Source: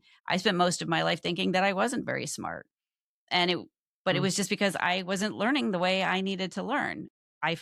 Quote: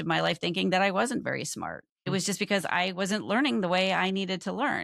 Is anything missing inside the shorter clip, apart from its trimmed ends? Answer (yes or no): yes